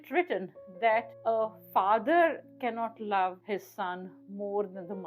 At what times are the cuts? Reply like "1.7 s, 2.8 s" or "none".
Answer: 3.4 s